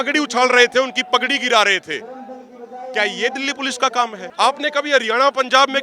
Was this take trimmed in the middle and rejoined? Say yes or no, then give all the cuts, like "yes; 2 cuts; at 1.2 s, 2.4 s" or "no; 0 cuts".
yes; 1 cut; at 4.2 s